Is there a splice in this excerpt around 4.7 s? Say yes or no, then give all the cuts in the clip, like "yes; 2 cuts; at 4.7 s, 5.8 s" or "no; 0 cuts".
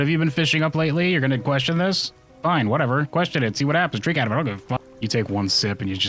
yes; 1 cut; at 4.7 s